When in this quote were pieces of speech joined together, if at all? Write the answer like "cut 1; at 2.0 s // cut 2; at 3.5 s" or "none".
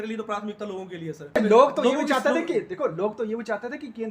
cut 1; at 1.4 s